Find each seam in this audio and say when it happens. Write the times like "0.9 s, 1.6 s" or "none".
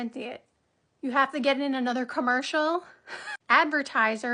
3.3 s